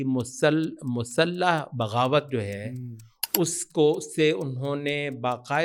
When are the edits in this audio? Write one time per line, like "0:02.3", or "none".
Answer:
none